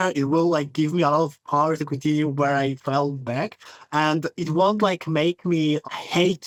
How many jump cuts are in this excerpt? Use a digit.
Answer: 0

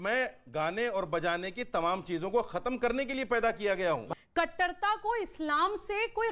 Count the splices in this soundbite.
1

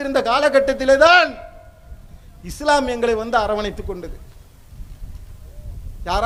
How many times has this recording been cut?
0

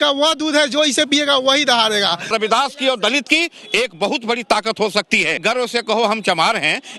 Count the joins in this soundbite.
2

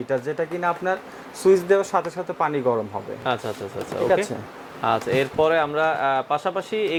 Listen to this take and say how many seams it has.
0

